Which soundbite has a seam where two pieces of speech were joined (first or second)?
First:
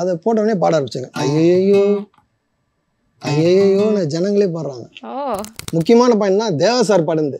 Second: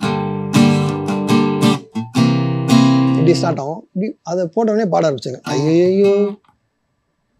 first